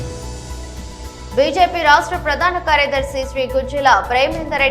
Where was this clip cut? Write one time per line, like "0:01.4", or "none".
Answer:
0:01.0